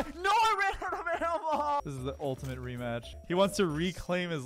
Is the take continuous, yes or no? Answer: no